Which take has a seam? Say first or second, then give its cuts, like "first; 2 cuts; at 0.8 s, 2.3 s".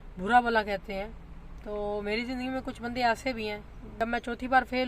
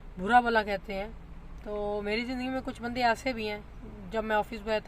first; 1 cut; at 3.9 s